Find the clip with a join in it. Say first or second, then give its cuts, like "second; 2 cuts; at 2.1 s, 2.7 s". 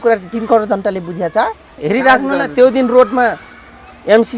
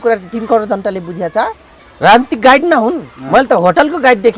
first; 1 cut; at 1.7 s